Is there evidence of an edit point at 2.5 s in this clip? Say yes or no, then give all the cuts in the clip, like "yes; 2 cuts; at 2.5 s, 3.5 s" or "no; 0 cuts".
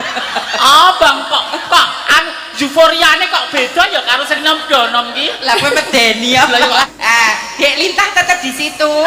no; 1 cut; at 6.9 s